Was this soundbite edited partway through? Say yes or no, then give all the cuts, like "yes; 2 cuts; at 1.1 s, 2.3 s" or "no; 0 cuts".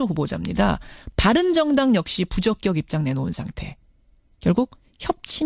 yes; 1 cut; at 4.3 s